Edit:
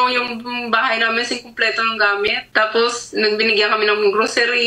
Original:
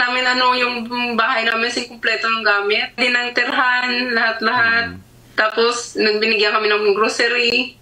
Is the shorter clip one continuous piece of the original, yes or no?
no